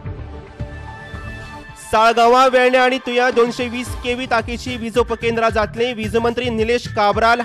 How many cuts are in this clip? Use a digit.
1